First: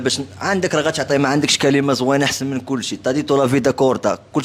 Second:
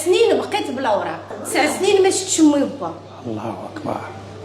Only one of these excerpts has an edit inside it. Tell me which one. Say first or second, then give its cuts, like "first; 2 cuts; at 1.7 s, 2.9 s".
second; 1 cut; at 1.2 s